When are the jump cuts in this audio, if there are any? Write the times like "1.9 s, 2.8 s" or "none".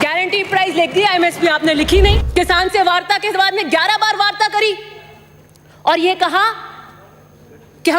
2.2 s